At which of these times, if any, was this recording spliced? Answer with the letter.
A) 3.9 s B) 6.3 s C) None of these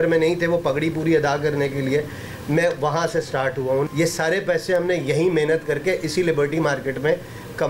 A